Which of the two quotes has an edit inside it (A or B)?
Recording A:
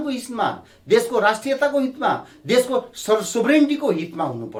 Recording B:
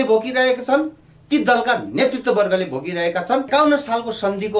B